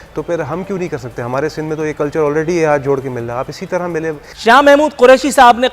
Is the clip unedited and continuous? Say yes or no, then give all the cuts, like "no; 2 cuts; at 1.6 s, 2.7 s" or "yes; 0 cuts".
no; 1 cut; at 4.2 s